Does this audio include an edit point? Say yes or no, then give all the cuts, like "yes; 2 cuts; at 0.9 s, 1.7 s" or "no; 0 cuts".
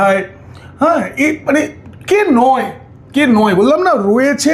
no; 0 cuts